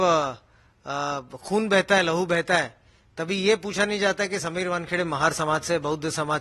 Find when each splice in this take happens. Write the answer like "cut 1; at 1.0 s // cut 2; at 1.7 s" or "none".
none